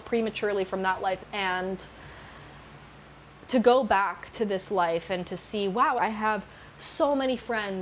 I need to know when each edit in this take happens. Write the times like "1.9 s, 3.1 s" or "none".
1.2 s, 6.0 s